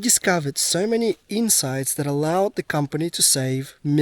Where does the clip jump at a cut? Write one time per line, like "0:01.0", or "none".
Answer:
none